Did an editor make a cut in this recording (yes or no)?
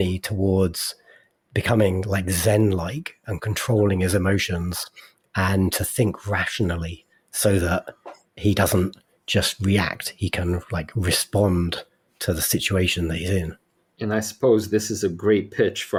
no